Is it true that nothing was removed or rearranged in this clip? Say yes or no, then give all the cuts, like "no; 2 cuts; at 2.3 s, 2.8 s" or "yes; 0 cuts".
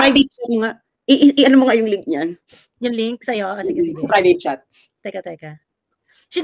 yes; 0 cuts